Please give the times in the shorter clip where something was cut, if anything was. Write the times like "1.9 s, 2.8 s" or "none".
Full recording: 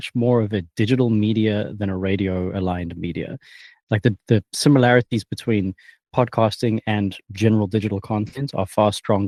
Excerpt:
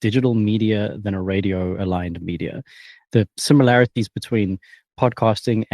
3.0 s

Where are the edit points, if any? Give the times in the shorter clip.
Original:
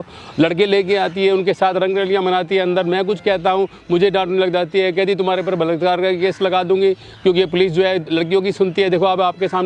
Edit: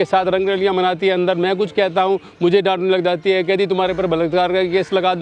none

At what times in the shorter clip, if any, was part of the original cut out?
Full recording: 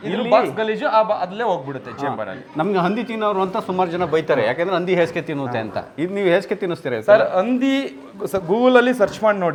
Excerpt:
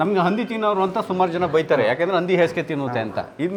none

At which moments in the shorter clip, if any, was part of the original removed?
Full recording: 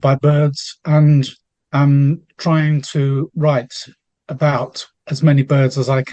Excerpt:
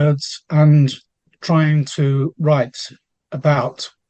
1.3 s

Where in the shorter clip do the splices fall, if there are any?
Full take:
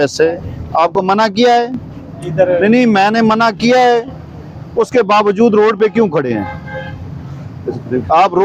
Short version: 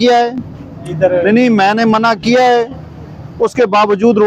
none

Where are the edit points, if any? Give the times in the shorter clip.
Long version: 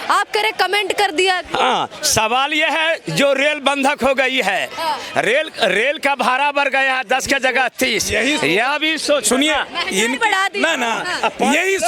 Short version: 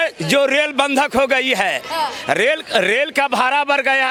none

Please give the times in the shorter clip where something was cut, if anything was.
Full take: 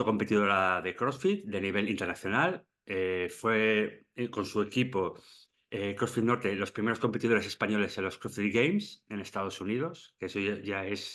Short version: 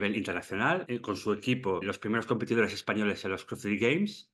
0.9 s, 1.8 s

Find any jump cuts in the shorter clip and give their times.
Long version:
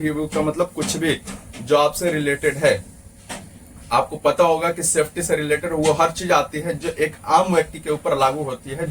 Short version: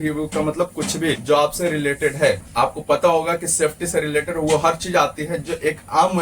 1.2 s, 2.5 s

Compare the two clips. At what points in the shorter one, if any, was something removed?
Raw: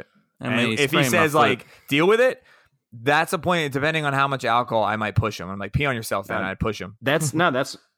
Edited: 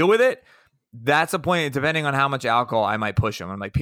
none

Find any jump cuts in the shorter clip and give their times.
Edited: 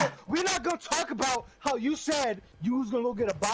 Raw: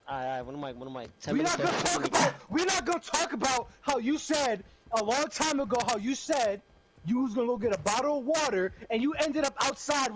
2.5 s

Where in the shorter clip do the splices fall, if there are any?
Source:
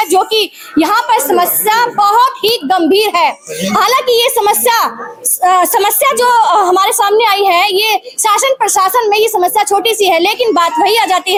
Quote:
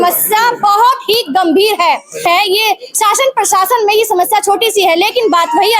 2.3 s

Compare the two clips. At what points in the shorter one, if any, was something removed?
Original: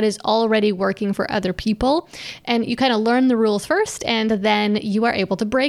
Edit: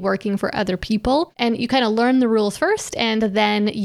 1.3 s

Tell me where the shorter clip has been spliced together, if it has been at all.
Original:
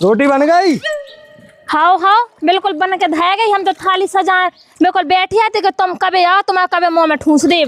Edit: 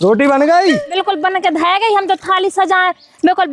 1.0 s

